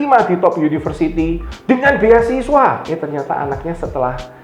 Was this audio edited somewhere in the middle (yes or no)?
yes